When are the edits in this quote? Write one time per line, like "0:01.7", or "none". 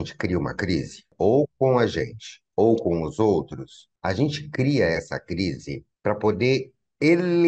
0:01.1